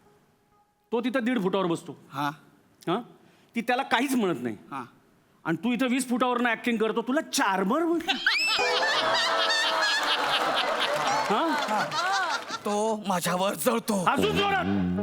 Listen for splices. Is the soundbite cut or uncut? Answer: cut